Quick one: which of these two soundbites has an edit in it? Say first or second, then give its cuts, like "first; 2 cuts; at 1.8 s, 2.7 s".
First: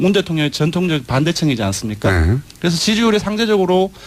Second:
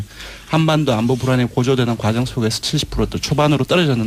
second; 1 cut; at 2.2 s